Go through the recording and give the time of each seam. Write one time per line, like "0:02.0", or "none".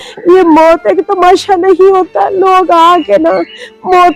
none